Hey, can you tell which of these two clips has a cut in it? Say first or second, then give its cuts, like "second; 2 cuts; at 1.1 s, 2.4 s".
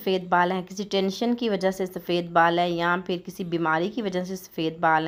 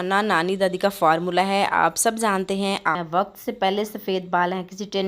second; 1 cut; at 2.9 s